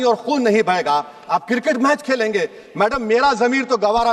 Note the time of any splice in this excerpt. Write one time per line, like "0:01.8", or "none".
none